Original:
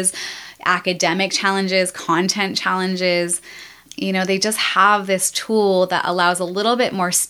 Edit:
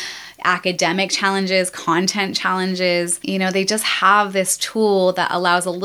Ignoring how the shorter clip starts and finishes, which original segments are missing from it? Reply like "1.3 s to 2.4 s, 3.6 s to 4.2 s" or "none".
3.4 s to 3.9 s